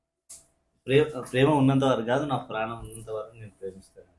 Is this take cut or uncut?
uncut